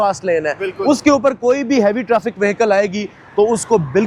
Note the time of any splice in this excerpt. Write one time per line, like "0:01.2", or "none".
none